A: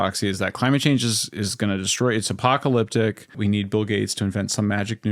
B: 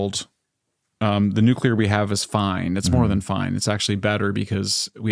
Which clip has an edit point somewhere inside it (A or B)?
A